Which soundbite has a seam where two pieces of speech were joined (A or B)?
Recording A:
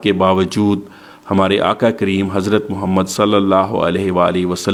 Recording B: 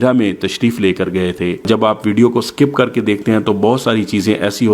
B